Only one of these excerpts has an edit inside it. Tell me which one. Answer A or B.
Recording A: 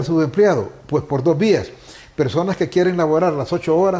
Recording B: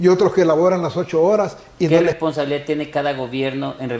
B